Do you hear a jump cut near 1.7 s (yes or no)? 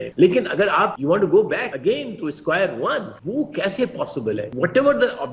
yes